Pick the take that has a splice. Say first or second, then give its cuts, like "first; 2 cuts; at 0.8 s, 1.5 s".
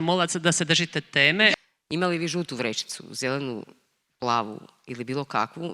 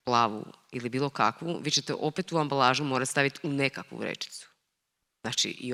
first; 1 cut; at 1.5 s